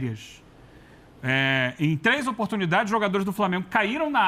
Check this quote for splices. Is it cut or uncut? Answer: uncut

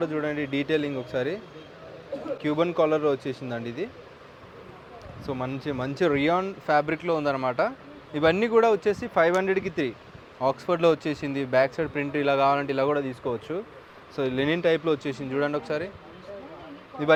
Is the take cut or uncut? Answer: uncut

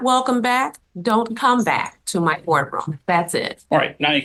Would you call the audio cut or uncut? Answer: uncut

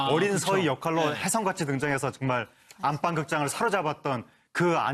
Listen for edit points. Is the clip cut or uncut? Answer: uncut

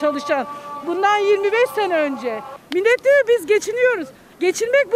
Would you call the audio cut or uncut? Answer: cut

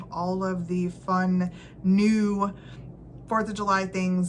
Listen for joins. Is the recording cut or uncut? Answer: uncut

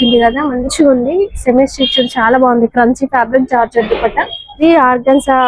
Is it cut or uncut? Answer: cut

